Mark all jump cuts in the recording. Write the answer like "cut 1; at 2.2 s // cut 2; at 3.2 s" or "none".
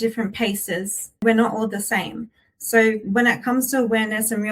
cut 1; at 1.2 s